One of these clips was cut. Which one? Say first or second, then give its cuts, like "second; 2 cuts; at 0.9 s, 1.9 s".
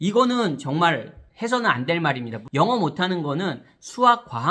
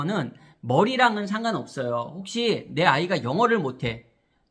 first; 1 cut; at 2.3 s